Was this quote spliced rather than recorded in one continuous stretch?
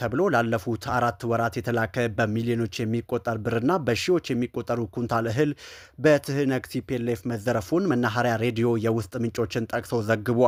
no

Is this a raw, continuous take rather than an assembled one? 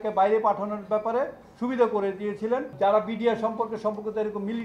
no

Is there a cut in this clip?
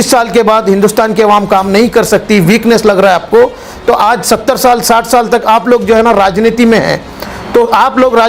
no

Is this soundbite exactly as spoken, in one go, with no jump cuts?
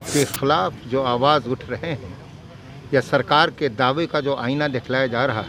yes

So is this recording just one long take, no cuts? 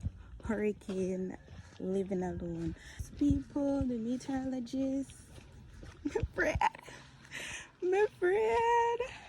no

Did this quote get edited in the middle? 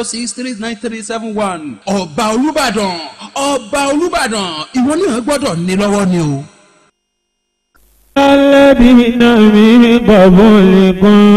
yes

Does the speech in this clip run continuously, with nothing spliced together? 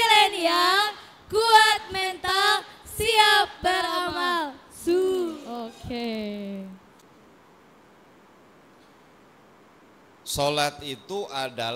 no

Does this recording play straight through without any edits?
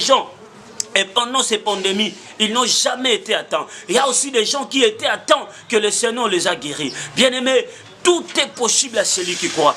yes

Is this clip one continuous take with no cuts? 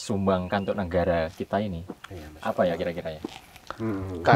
yes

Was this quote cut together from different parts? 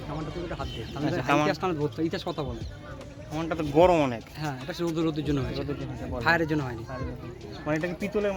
no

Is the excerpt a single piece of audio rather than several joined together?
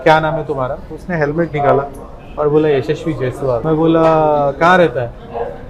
no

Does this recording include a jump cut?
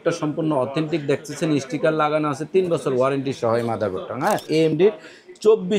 yes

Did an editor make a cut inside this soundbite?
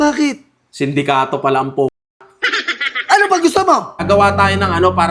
yes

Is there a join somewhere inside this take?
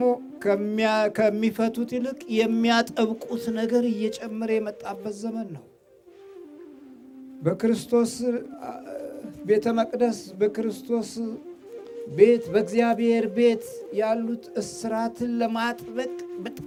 no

